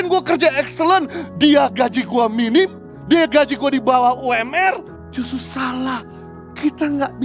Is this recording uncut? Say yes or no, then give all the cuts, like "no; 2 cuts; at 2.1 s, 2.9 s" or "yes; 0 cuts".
no; 2 cuts; at 2.9 s, 5.0 s